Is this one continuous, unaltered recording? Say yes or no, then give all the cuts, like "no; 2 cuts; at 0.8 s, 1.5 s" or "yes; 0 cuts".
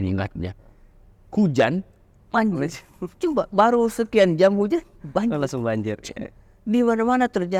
yes; 0 cuts